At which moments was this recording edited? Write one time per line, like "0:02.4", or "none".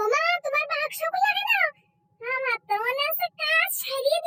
none